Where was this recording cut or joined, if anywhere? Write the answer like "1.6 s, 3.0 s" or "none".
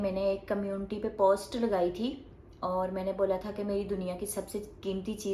none